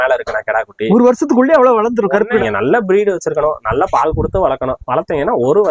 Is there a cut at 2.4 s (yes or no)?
yes